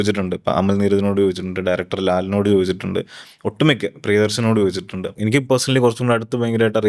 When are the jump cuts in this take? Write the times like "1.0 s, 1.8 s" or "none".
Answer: 5.0 s